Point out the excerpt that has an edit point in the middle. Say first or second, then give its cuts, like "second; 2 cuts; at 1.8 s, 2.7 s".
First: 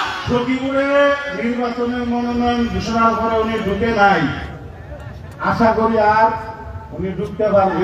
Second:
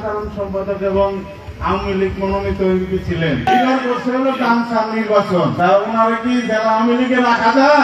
second; 2 cuts; at 3.5 s, 5.5 s